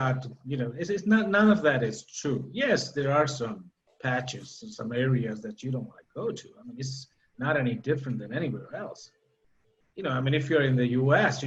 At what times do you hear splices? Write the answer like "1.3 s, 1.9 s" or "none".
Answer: none